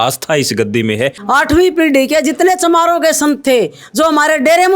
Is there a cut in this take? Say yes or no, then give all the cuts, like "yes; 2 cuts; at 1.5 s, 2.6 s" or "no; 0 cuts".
yes; 1 cut; at 1.2 s